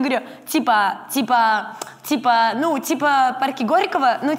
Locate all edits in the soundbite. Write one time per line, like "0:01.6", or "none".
none